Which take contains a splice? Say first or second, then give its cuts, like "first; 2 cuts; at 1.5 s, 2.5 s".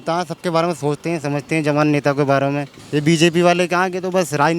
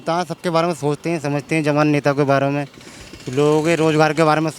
first; 1 cut; at 2.7 s